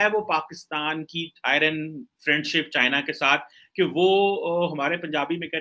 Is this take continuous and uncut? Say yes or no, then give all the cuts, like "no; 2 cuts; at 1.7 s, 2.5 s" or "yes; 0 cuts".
yes; 0 cuts